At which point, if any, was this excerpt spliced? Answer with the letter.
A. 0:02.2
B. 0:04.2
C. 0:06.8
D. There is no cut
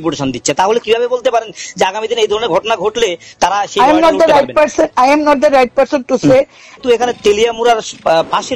C